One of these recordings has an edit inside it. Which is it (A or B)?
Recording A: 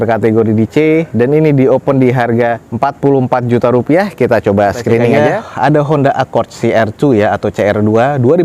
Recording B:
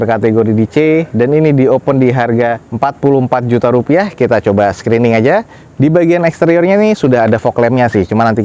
A